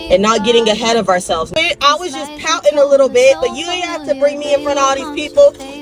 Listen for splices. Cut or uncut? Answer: cut